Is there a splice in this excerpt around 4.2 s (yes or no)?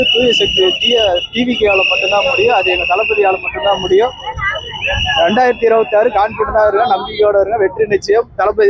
no